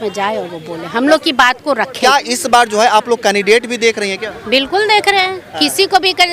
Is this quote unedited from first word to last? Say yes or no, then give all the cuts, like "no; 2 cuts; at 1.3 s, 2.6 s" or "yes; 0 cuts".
no; 1 cut; at 2.0 s